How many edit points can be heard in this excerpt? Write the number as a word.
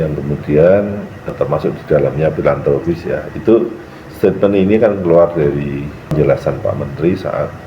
two